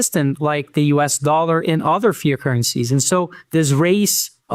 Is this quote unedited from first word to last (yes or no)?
yes